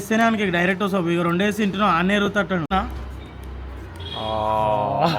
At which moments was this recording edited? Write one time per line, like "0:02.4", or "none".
0:02.7

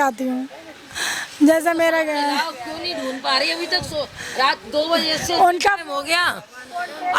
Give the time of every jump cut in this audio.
none

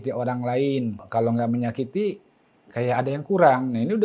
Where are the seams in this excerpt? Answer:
0:01.0

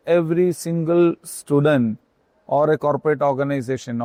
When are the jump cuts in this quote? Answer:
none

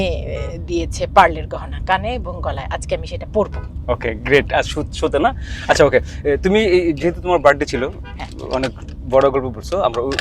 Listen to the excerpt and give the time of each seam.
none

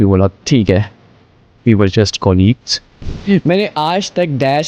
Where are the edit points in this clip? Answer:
0:02.9

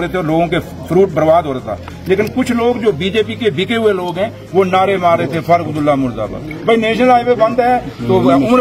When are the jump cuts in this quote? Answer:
none

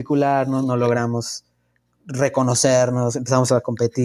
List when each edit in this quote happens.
none

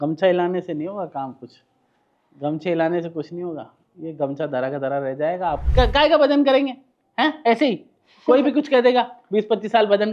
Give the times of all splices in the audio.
0:05.6

